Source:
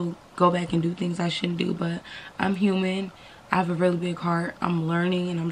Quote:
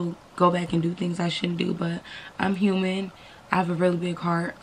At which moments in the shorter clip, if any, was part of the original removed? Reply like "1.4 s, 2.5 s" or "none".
none